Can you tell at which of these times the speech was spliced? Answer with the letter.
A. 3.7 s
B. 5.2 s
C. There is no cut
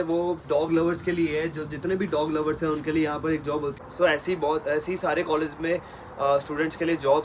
A